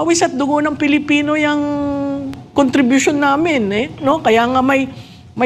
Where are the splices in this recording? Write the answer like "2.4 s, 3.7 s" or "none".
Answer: none